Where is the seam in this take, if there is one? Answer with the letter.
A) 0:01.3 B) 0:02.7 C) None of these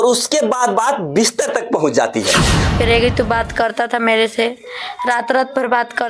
B